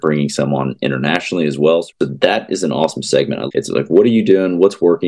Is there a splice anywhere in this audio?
yes; 2 cuts; at 1.9 s, 3.5 s

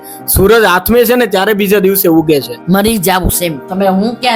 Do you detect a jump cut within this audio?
yes; 1 cut; at 2.5 s

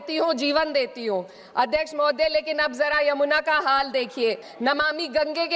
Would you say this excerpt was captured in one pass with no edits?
no; 1 cut; at 4.5 s

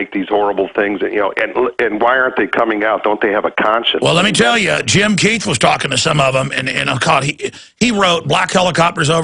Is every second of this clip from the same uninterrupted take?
yes; 0 cuts

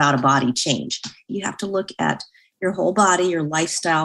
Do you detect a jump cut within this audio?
yes; 1 cut; at 1.3 s

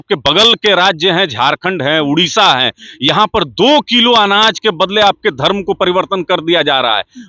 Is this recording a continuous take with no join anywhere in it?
yes; 0 cuts

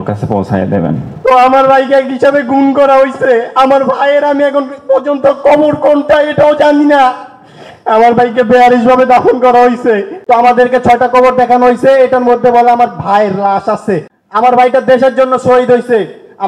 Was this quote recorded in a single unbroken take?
no; 3 cuts; at 1.1 s, 10.1 s, 14.1 s

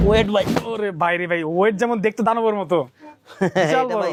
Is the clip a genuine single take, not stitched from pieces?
yes; 0 cuts

